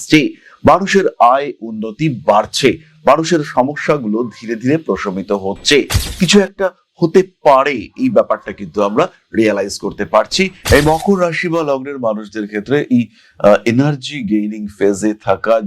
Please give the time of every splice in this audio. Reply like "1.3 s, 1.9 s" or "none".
6.0 s, 10.6 s